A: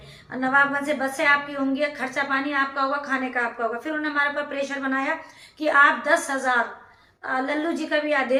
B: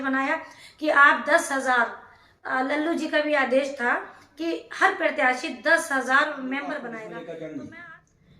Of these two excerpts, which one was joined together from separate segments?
B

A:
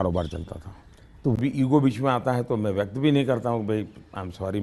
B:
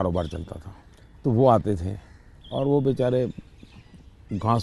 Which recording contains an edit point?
A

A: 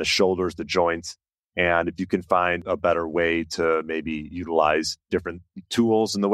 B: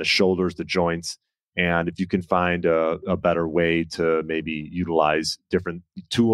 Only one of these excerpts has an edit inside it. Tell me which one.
A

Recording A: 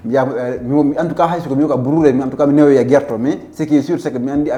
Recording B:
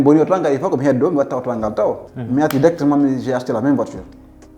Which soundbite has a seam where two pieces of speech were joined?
B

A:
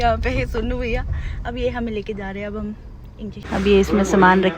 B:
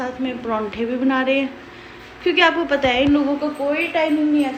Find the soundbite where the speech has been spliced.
A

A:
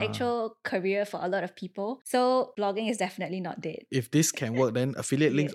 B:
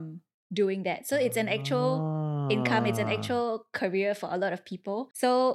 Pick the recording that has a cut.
A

